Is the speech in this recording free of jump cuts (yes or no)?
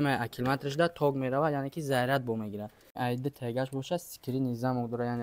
no